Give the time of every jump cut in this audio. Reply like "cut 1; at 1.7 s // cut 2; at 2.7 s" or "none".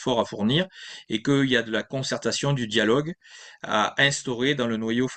none

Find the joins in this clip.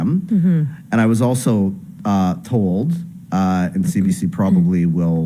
none

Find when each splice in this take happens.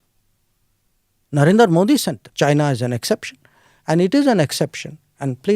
cut 1; at 2.2 s

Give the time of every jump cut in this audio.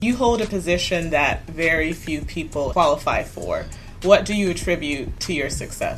cut 1; at 2.7 s // cut 2; at 5.1 s

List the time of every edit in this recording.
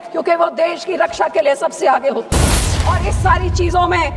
cut 1; at 2.7 s

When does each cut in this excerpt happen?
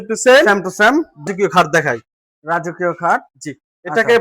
cut 1; at 1.2 s

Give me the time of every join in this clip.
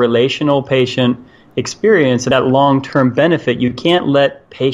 none

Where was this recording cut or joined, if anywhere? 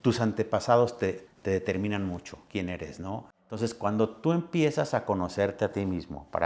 cut 1; at 1.2 s // cut 2; at 3.5 s

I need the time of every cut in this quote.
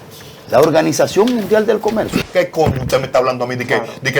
cut 1; at 2.2 s

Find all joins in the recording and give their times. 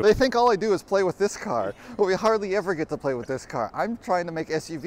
none

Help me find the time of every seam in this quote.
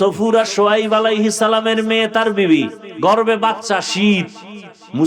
cut 1; at 2.8 s

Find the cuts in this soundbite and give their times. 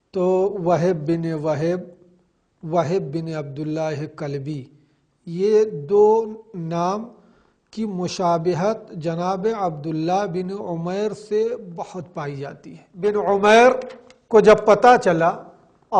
cut 1; at 13.1 s

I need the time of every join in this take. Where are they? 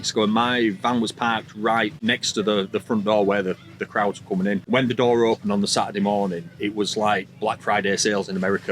cut 1; at 2.0 s // cut 2; at 4.6 s

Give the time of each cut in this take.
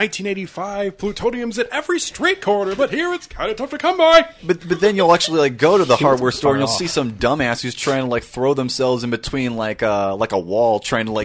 none

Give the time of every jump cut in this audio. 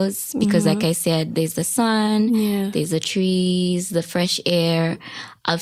none

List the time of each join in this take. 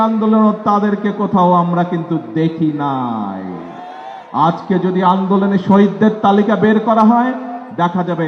none

